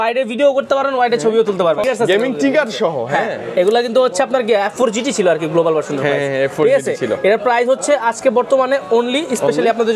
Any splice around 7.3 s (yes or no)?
no